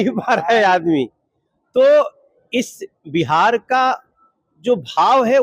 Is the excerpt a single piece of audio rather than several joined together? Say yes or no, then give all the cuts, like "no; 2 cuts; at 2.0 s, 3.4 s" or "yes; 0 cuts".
yes; 0 cuts